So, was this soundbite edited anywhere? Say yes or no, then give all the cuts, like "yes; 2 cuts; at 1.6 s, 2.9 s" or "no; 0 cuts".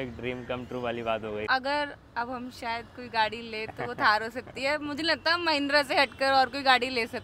yes; 1 cut; at 1.5 s